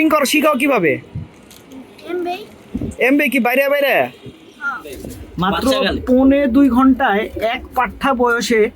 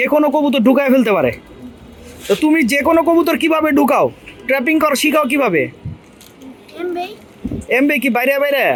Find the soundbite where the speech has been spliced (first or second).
first